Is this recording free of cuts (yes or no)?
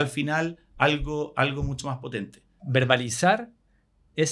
no